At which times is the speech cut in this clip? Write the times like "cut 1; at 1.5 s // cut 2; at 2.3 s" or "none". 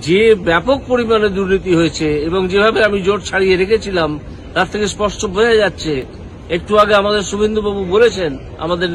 none